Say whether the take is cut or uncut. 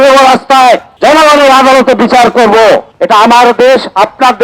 cut